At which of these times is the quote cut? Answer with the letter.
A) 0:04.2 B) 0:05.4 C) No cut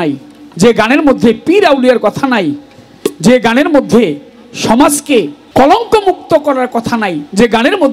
B